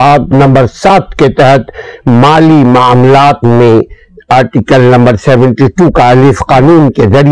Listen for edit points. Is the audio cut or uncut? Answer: uncut